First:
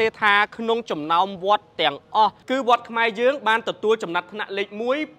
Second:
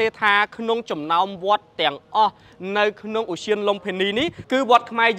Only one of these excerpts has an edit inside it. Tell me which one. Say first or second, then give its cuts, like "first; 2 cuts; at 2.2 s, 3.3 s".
first; 1 cut; at 2.4 s